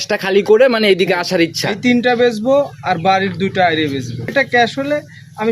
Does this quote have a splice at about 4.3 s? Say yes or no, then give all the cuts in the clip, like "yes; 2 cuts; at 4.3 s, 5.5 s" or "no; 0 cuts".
yes; 1 cut; at 4.3 s